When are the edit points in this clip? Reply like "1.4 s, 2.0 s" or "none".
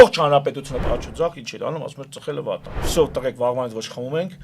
0.8 s, 2.8 s